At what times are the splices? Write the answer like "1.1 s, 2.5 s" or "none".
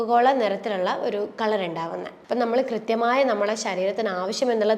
2.1 s